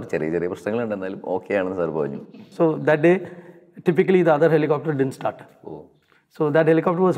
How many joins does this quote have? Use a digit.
1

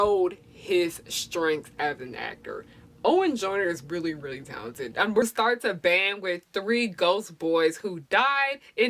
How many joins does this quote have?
1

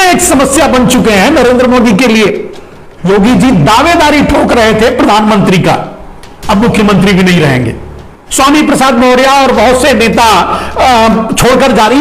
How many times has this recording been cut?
2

